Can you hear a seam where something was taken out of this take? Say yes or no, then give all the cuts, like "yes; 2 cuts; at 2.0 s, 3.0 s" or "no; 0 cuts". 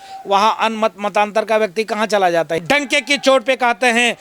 yes; 1 cut; at 2.6 s